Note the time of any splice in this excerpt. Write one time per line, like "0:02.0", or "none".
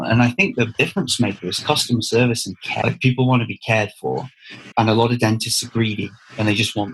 0:02.8